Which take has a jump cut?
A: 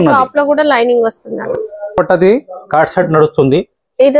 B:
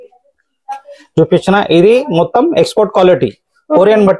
A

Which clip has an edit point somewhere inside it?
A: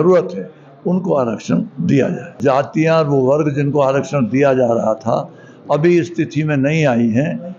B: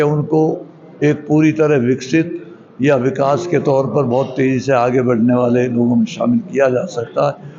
A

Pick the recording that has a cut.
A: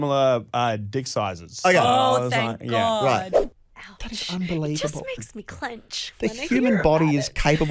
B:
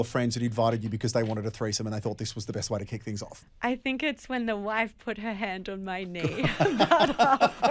A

